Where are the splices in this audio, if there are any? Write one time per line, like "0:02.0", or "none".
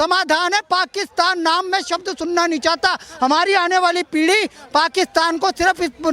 none